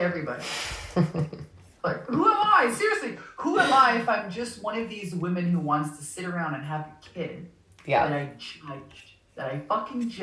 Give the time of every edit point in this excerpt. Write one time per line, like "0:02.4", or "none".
0:01.7